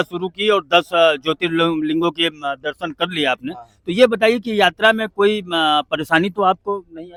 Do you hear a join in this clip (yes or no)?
no